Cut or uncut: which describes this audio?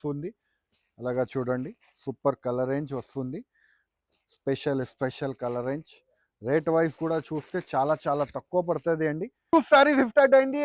cut